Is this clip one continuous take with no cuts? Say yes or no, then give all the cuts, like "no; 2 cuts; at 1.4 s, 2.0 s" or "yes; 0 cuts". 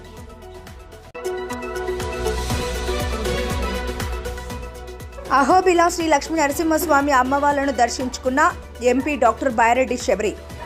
yes; 0 cuts